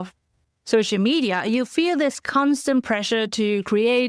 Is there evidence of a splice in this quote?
no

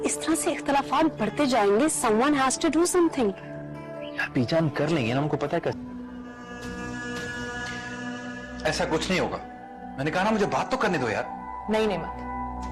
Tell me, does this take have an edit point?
yes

